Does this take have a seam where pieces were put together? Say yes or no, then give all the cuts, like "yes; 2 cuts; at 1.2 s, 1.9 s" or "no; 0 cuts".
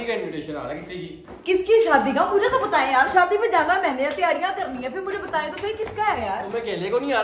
no; 0 cuts